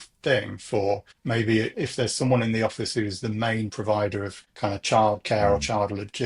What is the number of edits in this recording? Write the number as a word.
two